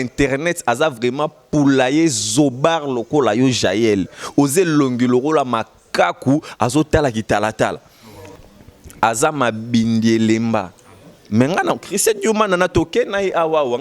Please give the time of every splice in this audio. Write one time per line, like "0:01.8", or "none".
0:08.2